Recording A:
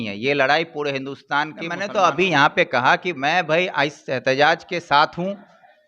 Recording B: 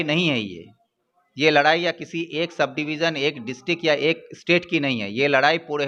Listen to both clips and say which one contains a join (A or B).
A